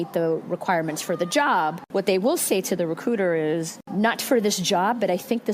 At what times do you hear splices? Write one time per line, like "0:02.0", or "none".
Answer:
0:01.8
0:03.8